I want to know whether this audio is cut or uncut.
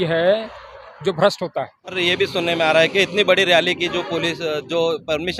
cut